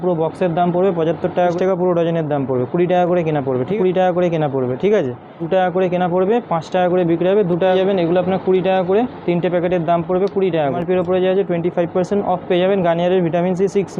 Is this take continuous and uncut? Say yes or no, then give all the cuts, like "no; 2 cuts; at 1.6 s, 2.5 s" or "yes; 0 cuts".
no; 5 cuts; at 1.6 s, 3.7 s, 5.4 s, 7.7 s, 10.8 s